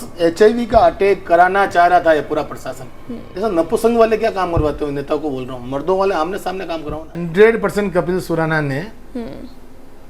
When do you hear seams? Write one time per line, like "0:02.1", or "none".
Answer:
0:03.3
0:07.2